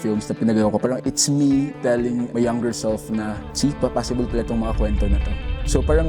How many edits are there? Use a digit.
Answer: 3